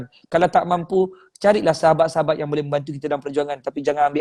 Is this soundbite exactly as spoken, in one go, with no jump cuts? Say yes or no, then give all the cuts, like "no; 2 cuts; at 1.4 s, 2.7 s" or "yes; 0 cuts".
yes; 0 cuts